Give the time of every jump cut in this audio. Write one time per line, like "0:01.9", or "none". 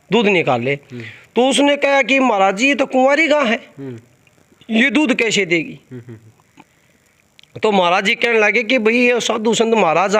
none